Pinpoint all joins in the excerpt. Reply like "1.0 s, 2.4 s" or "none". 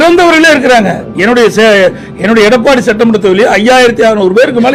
none